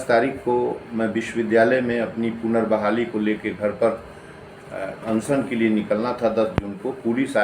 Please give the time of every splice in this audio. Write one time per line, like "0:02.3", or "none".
none